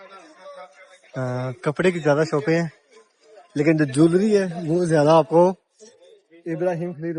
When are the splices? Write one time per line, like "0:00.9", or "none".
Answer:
none